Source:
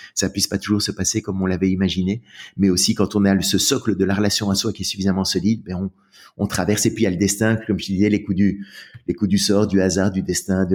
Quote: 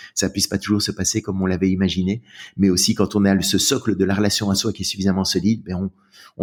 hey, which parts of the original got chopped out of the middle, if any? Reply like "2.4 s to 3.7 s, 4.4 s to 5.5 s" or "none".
none